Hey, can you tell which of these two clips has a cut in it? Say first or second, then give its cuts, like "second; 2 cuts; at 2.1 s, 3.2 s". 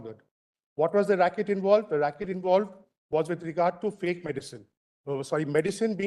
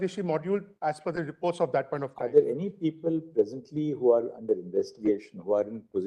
second; 1 cut; at 2.2 s